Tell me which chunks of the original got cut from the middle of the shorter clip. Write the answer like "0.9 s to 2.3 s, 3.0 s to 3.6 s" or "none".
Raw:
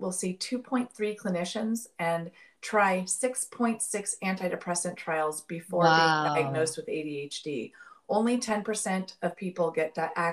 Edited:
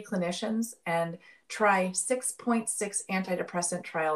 none